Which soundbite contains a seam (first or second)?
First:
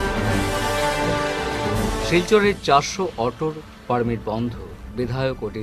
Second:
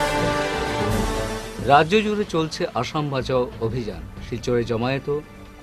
first